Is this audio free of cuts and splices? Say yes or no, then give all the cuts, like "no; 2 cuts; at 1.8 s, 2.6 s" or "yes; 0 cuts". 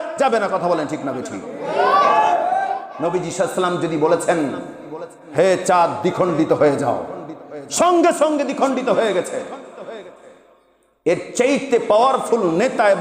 no; 1 cut; at 2.9 s